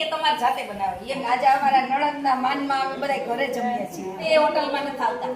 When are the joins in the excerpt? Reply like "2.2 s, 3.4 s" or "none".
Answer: 1.2 s, 4.2 s